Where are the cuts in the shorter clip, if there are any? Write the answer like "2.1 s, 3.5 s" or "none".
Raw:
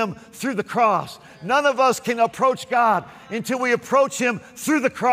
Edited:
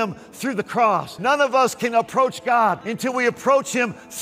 1.1 s, 2.9 s